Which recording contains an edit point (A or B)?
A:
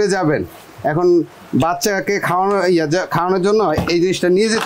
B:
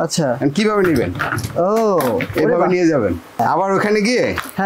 B